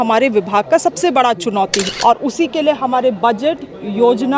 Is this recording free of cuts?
no; 1 cut; at 1.9 s

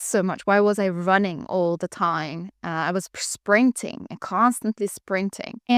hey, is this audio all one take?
yes; 0 cuts

